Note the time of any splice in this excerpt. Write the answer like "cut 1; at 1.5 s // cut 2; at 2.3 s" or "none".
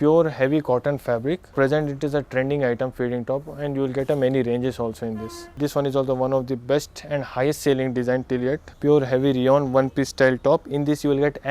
cut 1; at 1.5 s // cut 2; at 5.5 s // cut 3; at 8.7 s